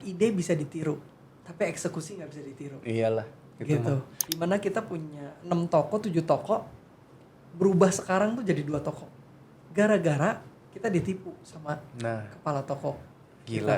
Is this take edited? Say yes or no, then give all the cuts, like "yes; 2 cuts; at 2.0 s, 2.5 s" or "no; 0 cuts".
yes; 1 cut; at 4.2 s